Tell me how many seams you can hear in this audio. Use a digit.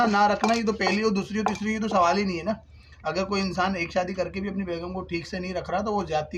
0